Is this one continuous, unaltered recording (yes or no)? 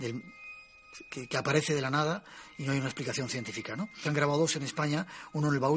yes